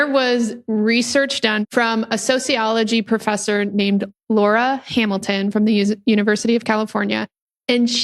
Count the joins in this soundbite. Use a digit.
1